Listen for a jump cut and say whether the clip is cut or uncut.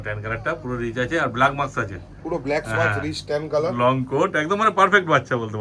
uncut